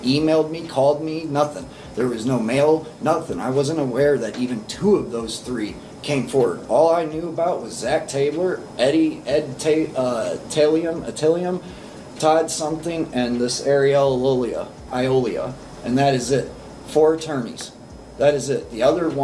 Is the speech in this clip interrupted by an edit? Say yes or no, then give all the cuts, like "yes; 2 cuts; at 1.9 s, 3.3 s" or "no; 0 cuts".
no; 0 cuts